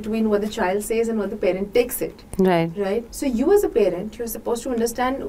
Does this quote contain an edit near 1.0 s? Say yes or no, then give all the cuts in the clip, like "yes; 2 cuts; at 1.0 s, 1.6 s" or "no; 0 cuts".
no; 1 cut; at 3.1 s